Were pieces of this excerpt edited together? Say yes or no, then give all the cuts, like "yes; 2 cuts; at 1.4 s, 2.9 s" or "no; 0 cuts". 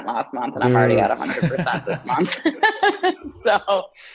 no; 0 cuts